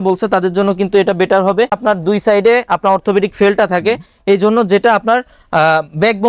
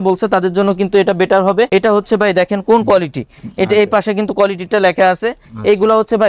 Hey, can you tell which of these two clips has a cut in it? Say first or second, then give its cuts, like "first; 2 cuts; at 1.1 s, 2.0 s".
first; 1 cut; at 1.7 s